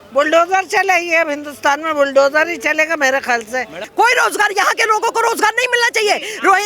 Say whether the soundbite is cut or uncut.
cut